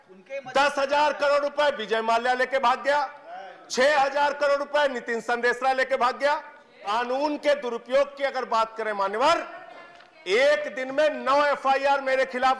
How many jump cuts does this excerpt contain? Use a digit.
1